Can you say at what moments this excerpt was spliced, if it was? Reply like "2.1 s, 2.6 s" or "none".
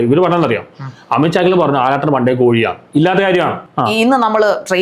3.6 s

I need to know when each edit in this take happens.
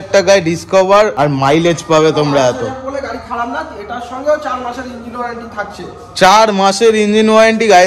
1.1 s

